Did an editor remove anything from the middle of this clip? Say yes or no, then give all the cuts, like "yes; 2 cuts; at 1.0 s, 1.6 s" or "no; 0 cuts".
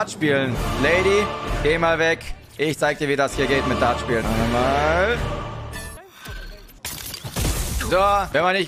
no; 0 cuts